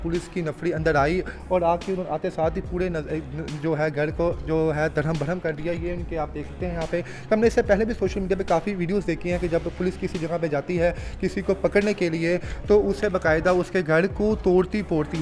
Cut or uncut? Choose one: uncut